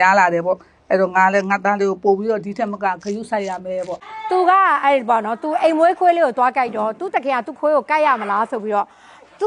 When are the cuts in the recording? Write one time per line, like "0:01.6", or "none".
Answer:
none

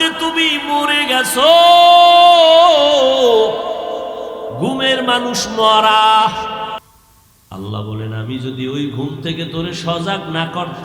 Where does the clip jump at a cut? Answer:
0:06.8

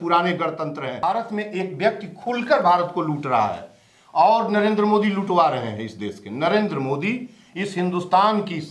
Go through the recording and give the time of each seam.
0:00.9

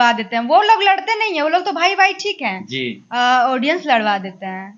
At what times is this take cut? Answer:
none

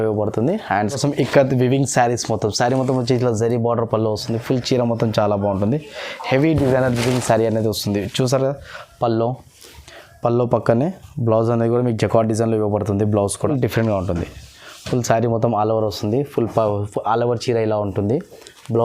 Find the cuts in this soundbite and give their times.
0:01.0
0:13.5

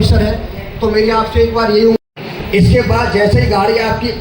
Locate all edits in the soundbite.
0:02.0

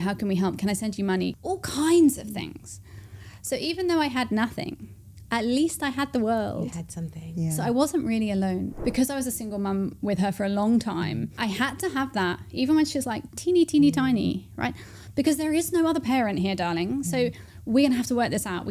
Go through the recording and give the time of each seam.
0:01.4
0:08.7

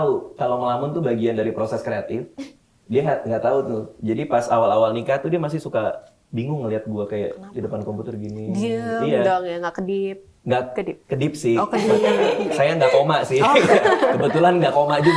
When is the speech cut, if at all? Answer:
none

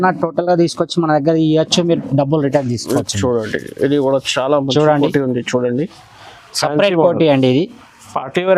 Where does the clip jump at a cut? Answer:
none

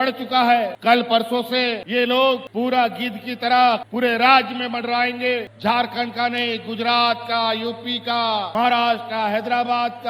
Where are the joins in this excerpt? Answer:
0:05.4

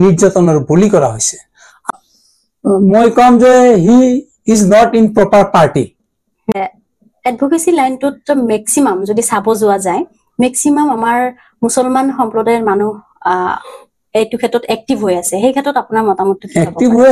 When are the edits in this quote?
0:01.9
0:06.5

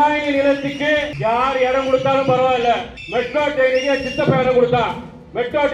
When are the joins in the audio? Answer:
0:01.1
0:03.0

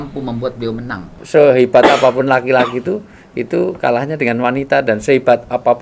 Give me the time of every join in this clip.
0:01.1

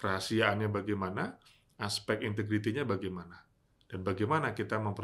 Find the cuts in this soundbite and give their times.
none

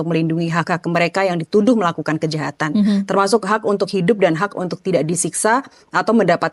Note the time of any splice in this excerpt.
none

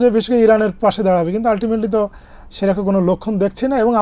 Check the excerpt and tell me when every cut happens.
none

